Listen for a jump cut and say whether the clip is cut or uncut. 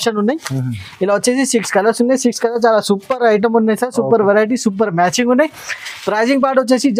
uncut